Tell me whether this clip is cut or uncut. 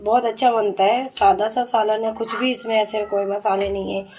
uncut